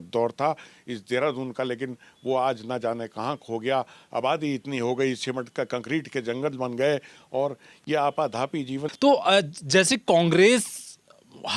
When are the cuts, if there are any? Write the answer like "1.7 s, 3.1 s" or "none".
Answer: 8.9 s